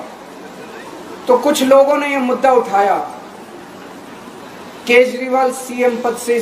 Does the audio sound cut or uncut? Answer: uncut